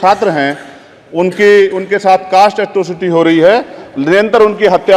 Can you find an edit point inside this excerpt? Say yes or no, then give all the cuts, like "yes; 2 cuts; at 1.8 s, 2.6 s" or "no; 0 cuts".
no; 0 cuts